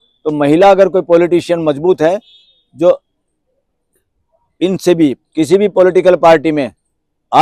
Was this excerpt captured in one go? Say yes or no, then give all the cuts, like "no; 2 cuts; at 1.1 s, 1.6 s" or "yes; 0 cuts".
no; 1 cut; at 5.2 s